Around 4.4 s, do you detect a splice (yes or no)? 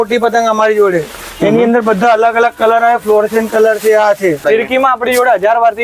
yes